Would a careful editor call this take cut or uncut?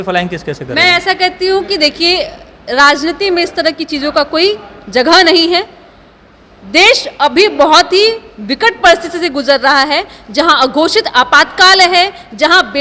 uncut